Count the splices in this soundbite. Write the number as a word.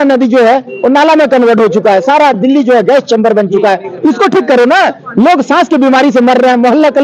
zero